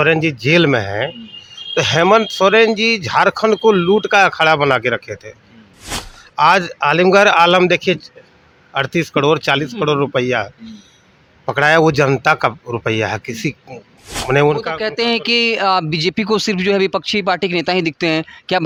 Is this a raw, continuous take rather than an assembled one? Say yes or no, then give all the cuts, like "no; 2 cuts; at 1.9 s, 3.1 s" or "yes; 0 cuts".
yes; 0 cuts